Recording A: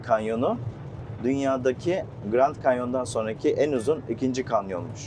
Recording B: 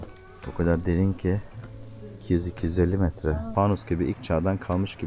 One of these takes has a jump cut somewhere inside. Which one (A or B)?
B